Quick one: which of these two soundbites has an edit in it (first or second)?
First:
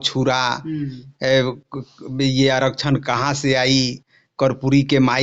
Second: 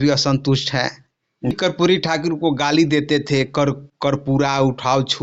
second